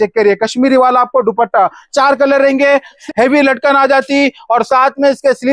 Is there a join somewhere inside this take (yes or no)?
yes